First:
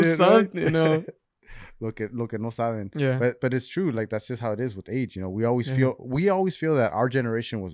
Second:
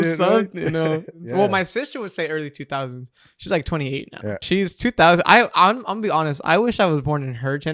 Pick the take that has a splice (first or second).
second